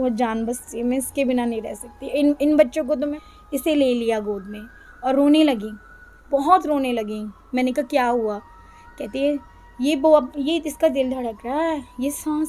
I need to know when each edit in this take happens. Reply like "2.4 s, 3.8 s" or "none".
3.2 s